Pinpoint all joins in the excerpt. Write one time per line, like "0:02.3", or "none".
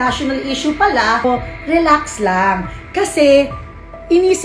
0:01.2

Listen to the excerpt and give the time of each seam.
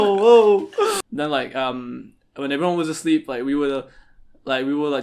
0:01.0

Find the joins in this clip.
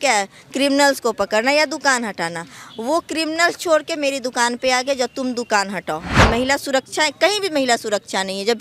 0:06.2

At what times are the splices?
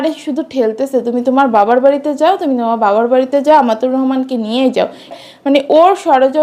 0:05.2

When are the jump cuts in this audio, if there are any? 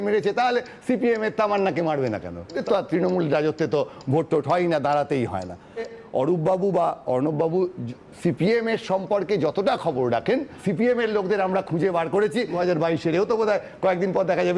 0:02.5
0:06.0
0:10.5
0:12.5

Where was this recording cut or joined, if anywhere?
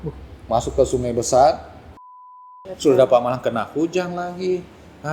0:02.4

